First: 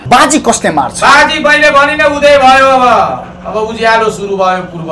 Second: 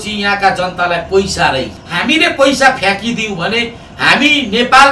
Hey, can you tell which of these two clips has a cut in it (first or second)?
second